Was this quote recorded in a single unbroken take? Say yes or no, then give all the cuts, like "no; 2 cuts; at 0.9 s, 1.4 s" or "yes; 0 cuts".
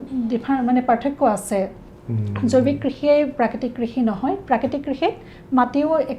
yes; 0 cuts